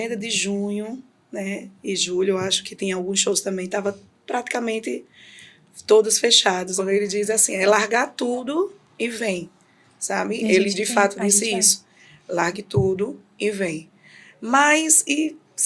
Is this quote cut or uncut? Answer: cut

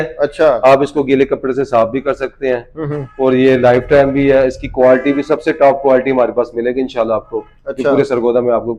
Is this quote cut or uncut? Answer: uncut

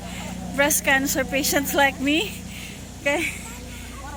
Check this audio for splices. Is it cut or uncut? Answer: uncut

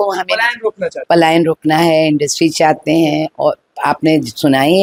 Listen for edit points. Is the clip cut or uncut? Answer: uncut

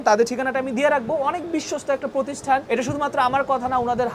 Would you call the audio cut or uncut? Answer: uncut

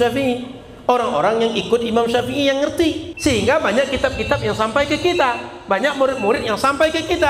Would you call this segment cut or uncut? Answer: cut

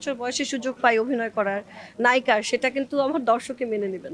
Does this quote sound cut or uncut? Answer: uncut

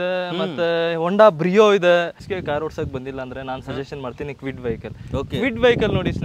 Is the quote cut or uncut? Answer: cut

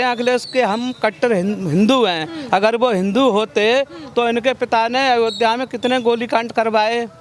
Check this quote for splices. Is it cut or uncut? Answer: uncut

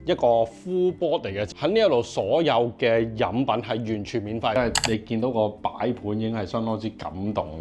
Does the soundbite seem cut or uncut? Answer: cut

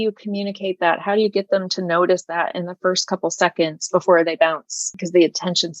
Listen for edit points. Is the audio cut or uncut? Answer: cut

